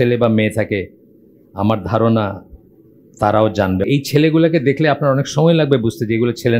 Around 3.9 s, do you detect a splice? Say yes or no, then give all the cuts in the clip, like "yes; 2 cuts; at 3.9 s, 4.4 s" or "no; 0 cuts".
yes; 1 cut; at 3.9 s